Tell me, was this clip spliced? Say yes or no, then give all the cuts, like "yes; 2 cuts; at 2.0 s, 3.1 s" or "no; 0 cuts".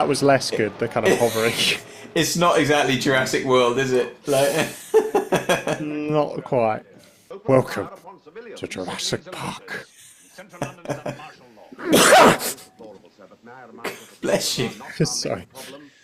no; 0 cuts